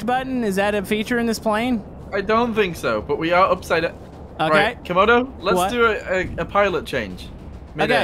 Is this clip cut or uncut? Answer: uncut